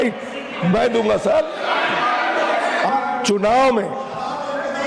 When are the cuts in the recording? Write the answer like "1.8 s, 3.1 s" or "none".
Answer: 2.9 s

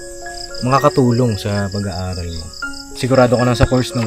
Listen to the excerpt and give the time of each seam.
2.9 s

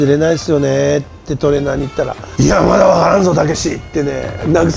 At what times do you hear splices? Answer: 2.2 s

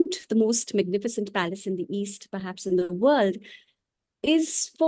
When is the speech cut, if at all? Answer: none

